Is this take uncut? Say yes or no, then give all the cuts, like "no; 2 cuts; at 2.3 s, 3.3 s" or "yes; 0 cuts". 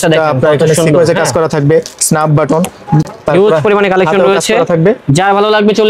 yes; 0 cuts